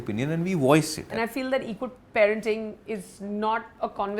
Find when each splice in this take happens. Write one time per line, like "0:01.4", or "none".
0:01.2